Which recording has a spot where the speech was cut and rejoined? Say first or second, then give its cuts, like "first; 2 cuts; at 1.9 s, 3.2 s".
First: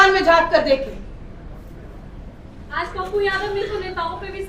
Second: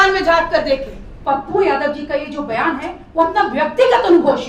second; 1 cut; at 1.2 s